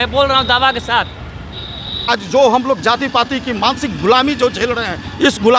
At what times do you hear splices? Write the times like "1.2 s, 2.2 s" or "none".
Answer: 2.1 s